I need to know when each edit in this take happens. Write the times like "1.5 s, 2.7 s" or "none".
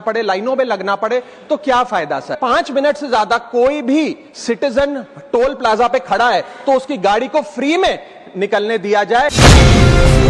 2.4 s, 9.3 s